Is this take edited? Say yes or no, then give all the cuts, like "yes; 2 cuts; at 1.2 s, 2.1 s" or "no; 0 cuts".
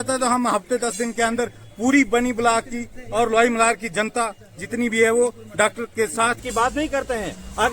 yes; 1 cut; at 6.4 s